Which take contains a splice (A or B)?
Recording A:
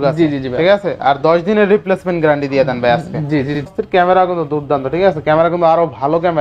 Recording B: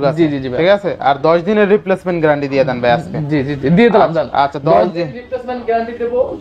A